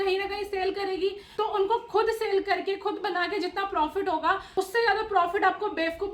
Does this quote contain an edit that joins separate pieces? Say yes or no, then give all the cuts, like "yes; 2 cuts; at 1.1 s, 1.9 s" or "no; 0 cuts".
yes; 2 cuts; at 1.2 s, 4.4 s